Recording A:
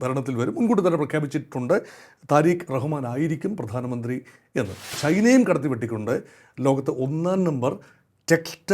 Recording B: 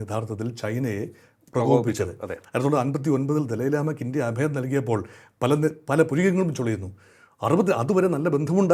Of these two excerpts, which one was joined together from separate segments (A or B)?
A